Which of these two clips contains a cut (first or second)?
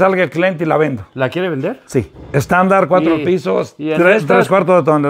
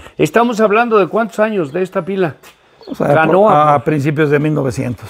first